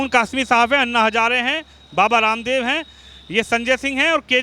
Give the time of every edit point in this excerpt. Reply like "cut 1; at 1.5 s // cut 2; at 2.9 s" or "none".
none